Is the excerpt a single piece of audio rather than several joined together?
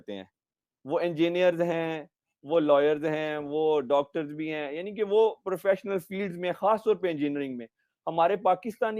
yes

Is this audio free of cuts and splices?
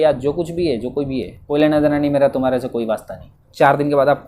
no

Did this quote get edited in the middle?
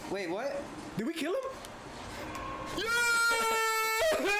no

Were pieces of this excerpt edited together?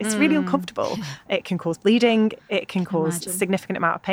yes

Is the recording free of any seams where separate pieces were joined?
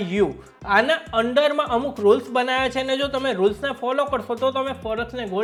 yes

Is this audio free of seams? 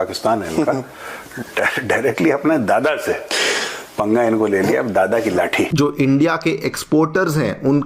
no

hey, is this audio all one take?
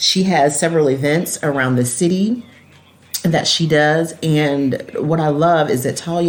yes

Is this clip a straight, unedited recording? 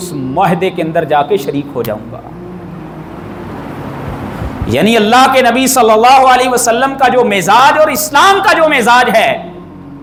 yes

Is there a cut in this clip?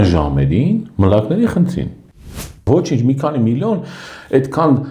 yes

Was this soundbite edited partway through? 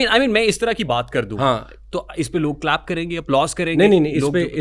no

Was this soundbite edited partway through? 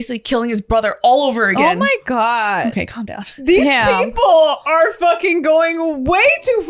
no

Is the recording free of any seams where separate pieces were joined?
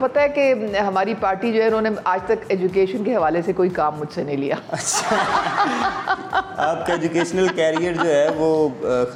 yes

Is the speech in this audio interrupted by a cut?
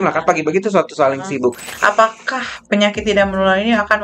yes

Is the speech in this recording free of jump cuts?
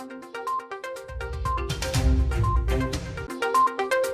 no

